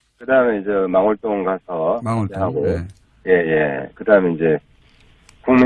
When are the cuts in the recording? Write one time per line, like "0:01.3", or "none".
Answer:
none